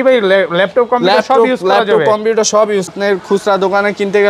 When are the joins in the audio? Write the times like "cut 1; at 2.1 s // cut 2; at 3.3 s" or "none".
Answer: cut 1; at 2.9 s